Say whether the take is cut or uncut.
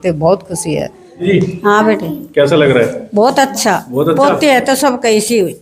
cut